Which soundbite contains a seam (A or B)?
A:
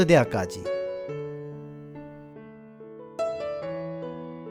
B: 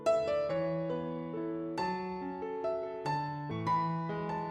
B